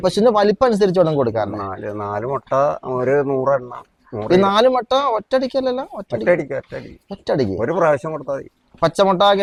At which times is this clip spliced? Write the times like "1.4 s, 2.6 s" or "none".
none